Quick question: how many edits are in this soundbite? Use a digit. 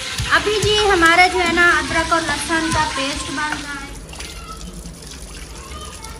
1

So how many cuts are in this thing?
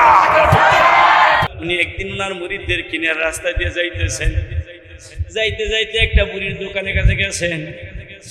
1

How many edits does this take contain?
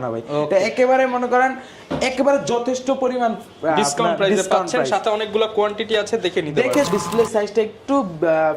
1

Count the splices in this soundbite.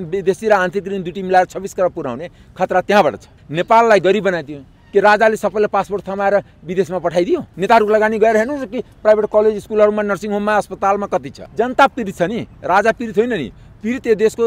2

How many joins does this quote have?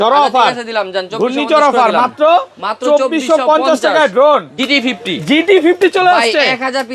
1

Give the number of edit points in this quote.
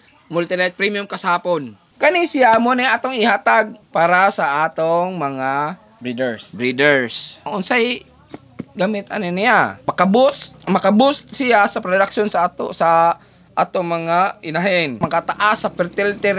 5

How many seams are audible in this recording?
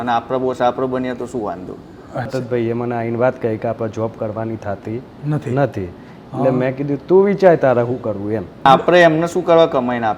2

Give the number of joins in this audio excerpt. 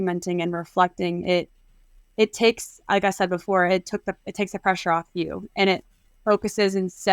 0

